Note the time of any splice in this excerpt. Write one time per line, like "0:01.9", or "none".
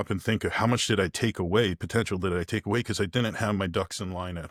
none